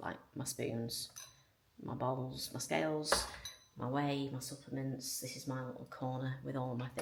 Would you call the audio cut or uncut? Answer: uncut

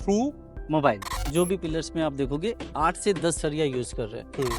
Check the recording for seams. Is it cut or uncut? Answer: cut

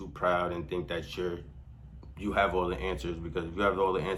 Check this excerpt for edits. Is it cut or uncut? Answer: uncut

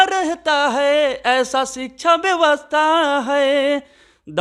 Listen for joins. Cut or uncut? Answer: uncut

